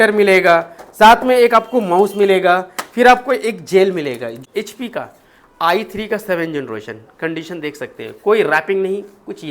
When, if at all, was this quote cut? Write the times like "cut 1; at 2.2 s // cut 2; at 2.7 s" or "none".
cut 1; at 4.3 s